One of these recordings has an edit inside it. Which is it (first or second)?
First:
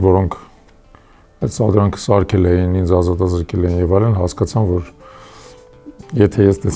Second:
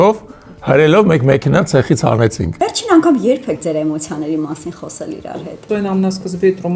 second